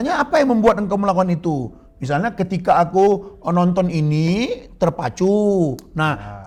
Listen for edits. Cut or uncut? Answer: uncut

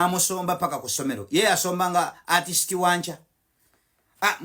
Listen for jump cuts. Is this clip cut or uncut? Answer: uncut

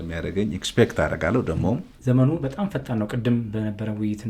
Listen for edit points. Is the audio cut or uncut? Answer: cut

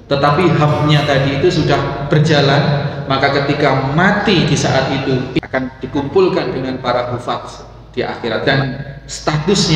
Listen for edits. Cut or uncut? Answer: cut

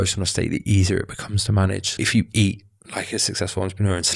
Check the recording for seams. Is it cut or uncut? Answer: cut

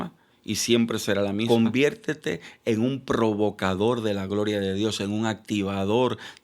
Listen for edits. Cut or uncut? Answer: cut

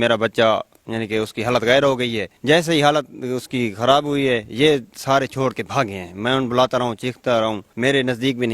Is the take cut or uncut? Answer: cut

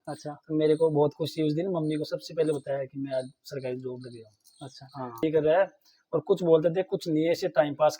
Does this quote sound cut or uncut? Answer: cut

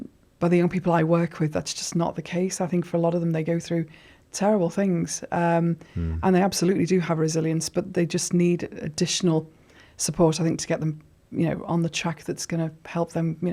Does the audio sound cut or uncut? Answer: uncut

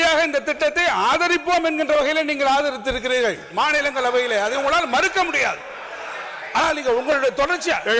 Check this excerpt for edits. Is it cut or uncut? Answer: uncut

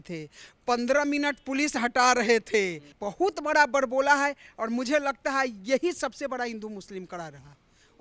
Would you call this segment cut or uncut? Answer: cut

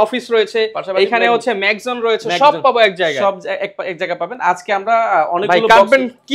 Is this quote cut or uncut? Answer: uncut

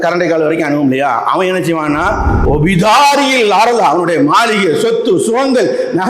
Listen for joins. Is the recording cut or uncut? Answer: cut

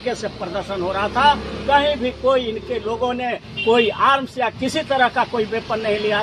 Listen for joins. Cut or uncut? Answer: uncut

